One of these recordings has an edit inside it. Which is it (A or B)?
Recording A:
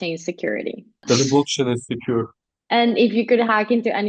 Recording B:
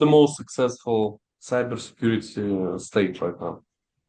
A